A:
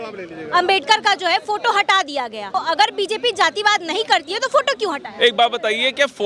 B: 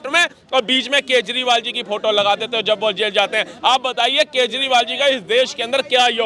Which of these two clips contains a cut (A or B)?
A